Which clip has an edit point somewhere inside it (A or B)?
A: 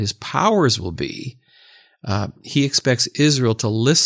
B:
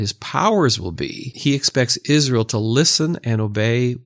B